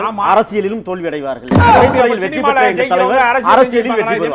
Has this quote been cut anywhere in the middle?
no; 0 cuts

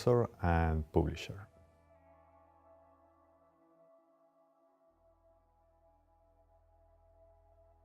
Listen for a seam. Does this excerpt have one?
yes; 1 cut; at 6.6 s

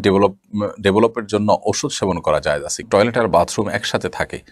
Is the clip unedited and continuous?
no; 1 cut; at 2.8 s

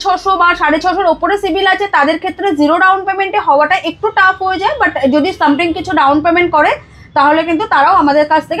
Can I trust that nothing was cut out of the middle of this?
yes; 0 cuts

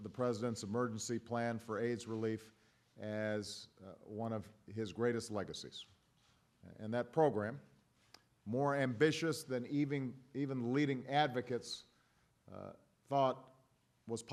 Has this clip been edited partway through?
no; 0 cuts

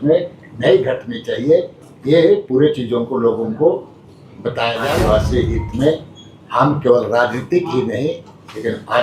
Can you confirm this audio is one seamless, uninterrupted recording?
no; 1 cut; at 4.8 s

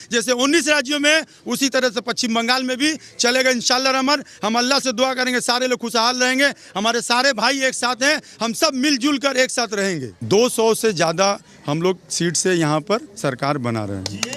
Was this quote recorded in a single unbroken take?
no; 1 cut; at 10.1 s

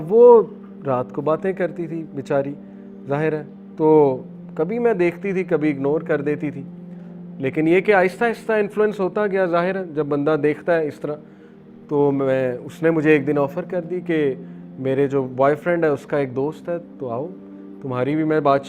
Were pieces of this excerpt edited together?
no; 0 cuts

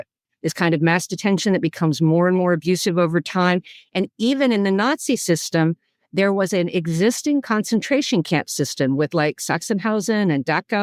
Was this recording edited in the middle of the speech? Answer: no; 0 cuts

